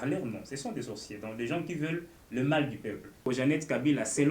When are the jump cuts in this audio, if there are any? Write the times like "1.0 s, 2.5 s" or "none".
3.2 s